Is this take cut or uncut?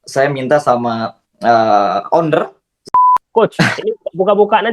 cut